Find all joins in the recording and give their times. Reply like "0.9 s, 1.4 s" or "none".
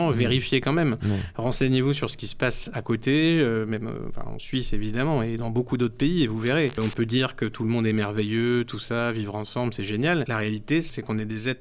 6.8 s, 10.7 s